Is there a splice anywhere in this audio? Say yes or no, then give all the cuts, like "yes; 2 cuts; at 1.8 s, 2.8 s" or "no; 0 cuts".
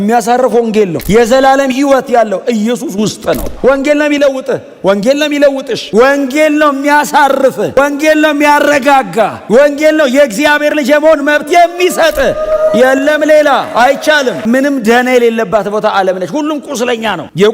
yes; 2 cuts; at 3.5 s, 14.4 s